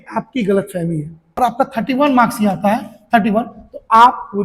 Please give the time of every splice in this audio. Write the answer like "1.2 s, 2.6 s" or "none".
1.2 s